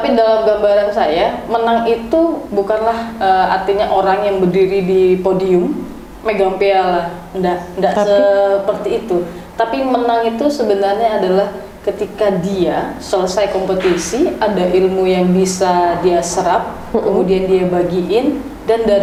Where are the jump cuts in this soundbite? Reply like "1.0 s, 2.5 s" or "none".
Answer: none